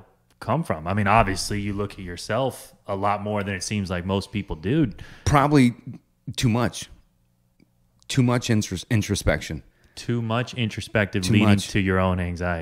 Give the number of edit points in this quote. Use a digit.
0